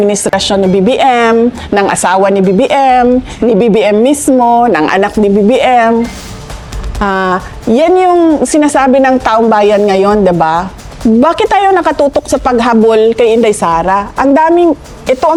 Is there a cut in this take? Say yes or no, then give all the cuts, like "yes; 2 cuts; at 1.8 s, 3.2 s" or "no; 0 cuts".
no; 0 cuts